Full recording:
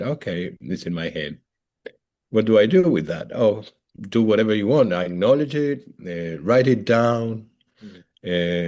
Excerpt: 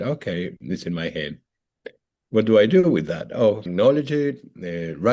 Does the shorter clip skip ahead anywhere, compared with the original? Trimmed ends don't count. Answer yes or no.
yes